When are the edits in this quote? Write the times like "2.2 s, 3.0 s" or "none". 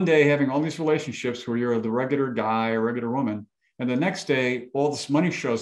none